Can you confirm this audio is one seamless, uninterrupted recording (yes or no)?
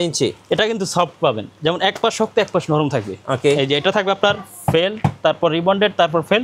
yes